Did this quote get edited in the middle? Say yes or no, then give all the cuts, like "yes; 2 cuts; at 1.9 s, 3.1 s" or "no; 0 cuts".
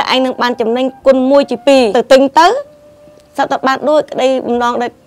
yes; 1 cut; at 1.9 s